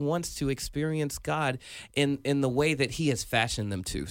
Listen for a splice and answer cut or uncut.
uncut